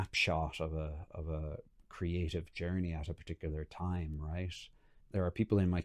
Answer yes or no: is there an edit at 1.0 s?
no